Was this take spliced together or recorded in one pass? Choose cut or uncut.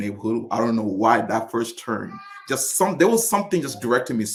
uncut